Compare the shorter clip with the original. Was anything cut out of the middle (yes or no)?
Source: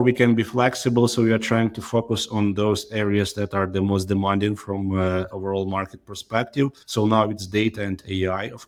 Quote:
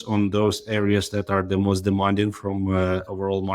no